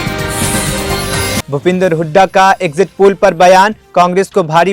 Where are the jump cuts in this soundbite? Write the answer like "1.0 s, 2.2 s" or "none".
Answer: none